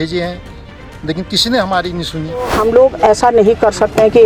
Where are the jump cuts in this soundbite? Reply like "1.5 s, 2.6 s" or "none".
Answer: 2.5 s